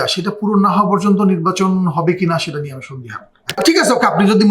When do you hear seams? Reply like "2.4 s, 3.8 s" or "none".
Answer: 3.5 s